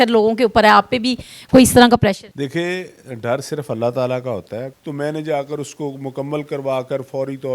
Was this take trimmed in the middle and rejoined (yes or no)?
yes